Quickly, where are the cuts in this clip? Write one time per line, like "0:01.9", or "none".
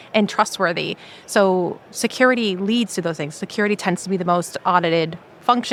none